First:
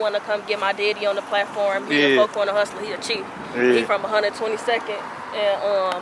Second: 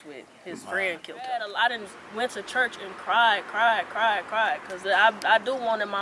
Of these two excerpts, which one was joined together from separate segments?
second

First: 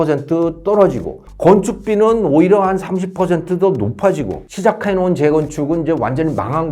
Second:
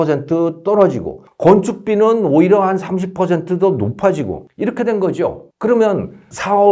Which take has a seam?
first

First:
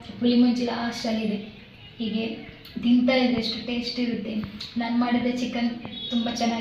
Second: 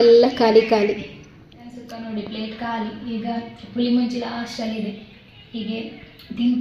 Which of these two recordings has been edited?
second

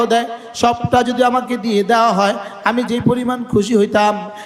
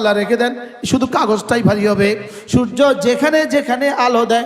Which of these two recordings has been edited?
second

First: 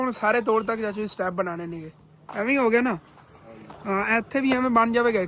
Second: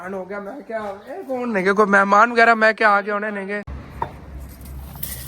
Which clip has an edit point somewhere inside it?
second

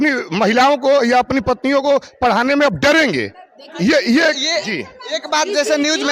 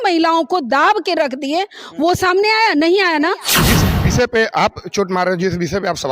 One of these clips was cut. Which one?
second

